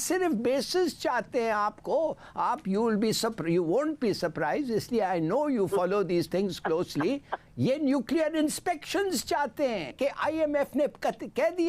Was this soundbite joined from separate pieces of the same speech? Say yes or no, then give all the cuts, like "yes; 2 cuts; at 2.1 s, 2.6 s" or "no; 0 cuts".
yes; 1 cut; at 9.9 s